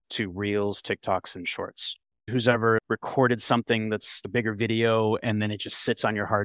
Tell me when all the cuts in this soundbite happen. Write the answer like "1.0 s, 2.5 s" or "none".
2.2 s